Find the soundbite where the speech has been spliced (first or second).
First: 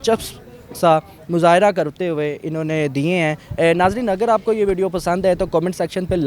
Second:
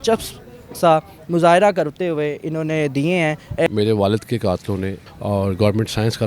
second